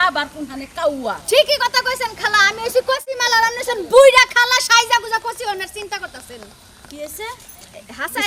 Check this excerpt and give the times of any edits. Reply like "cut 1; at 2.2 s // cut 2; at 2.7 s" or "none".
none